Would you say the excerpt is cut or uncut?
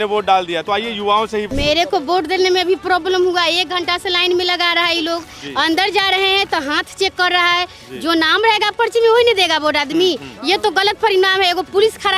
cut